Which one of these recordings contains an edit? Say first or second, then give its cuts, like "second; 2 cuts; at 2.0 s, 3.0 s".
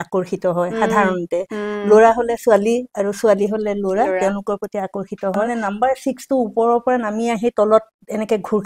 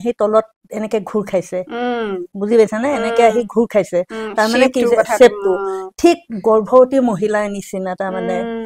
first; 1 cut; at 5.5 s